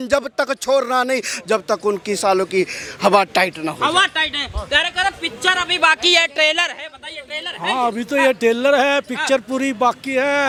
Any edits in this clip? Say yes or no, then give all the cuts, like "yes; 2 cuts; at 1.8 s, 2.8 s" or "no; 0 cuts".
no; 0 cuts